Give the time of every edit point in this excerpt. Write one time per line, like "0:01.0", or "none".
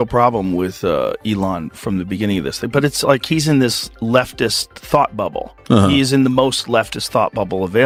none